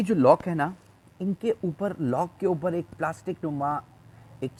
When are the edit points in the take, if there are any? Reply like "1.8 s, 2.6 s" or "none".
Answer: none